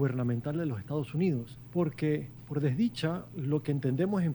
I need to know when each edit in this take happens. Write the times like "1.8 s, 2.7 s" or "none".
1.6 s, 2.4 s, 3.3 s